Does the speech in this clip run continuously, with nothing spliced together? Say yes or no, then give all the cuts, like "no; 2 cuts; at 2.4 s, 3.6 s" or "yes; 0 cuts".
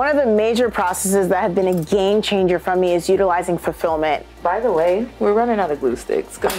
no; 2 cuts; at 4.3 s, 5.1 s